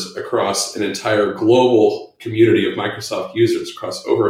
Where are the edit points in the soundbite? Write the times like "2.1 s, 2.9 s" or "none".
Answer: none

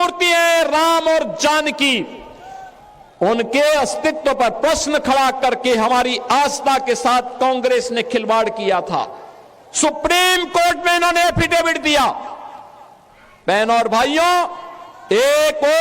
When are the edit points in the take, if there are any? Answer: none

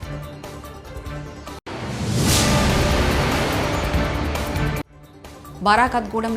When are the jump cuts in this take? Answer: 1.6 s

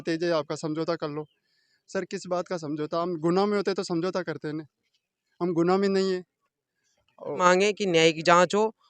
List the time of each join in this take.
1.6 s, 7.4 s

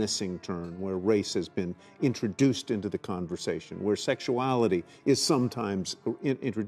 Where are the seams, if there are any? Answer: none

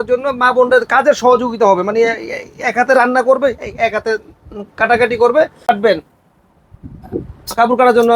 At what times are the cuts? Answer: 5.7 s

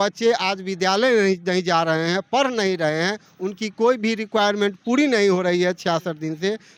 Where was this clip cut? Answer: none

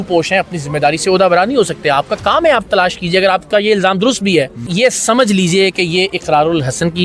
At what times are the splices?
4.6 s

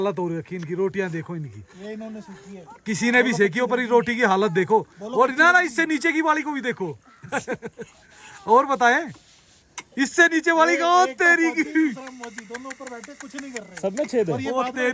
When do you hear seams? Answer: none

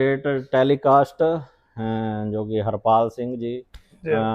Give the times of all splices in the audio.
none

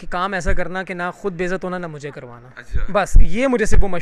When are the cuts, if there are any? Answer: none

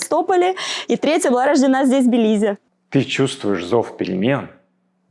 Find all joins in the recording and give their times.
none

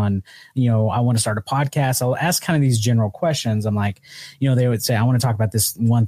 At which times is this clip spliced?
none

